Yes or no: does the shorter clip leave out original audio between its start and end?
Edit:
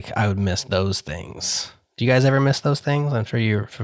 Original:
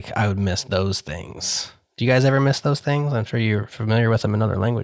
no